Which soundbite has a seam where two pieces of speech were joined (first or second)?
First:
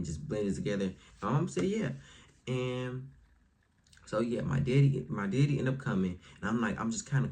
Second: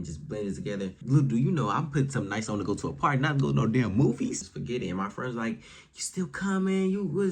second